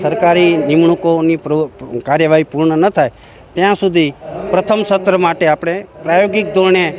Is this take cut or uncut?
uncut